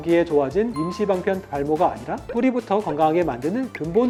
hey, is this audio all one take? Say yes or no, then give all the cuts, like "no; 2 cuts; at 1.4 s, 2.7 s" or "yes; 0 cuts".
yes; 0 cuts